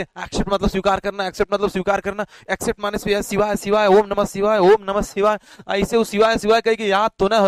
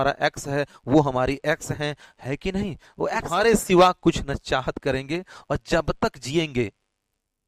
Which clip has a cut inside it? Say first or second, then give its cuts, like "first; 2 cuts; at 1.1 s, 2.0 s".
second; 1 cut; at 3.3 s